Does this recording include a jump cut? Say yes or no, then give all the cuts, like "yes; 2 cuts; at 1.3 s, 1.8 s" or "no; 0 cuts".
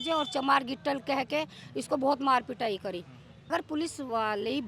yes; 1 cut; at 3.5 s